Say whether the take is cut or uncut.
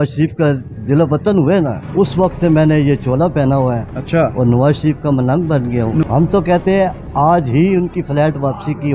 cut